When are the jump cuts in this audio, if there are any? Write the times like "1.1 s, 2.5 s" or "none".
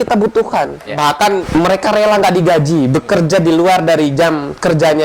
1.1 s